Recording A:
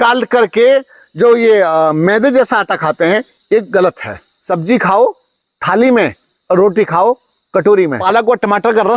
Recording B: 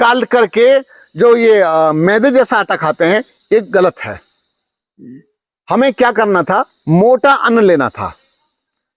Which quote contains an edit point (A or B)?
A